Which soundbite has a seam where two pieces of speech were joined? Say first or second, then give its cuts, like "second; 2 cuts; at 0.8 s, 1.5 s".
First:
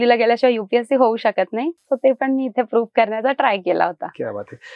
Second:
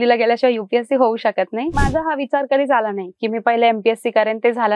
second; 1 cut; at 1.8 s